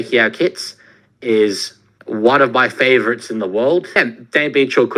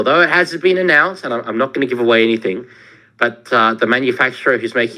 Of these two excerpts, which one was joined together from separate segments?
first; 1 cut; at 4.0 s

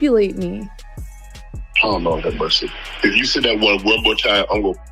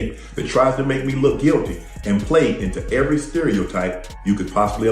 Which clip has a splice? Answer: second; 1 cut; at 1.7 s

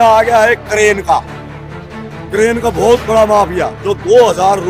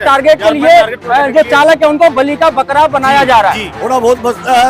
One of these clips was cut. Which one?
second; 1 cut; at 3.7 s

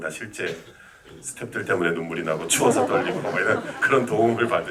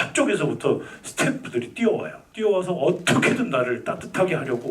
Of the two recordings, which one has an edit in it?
second; 1 cut; at 2.2 s

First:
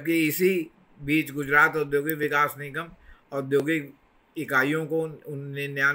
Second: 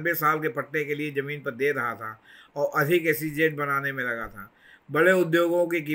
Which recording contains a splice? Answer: first; 1 cut; at 2.2 s

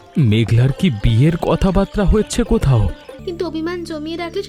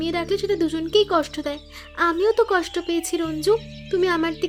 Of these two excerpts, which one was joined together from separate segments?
first; 1 cut; at 3.1 s

